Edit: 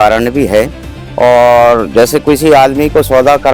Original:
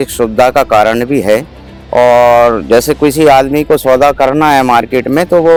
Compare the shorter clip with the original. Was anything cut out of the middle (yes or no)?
no